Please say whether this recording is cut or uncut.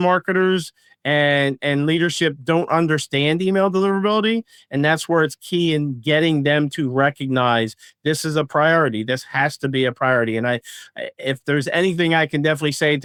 uncut